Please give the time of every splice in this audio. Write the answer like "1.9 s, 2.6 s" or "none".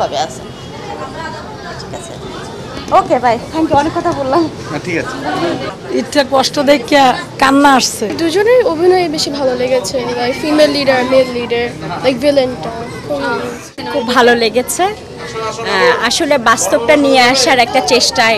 5.7 s, 8.0 s, 13.6 s